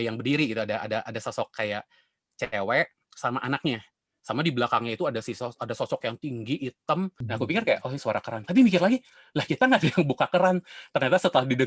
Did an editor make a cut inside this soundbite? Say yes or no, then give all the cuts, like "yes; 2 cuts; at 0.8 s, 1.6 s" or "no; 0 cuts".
yes; 1 cut; at 7.2 s